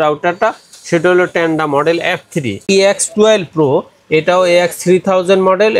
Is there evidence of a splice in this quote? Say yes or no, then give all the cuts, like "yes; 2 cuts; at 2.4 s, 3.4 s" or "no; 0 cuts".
yes; 1 cut; at 2.5 s